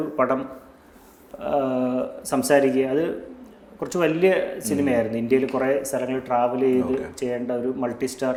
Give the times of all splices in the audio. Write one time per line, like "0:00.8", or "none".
none